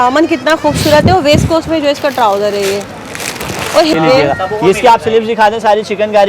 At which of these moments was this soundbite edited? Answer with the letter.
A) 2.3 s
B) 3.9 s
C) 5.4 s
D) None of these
B